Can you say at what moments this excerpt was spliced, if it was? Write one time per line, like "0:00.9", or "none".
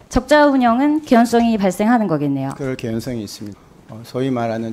0:03.5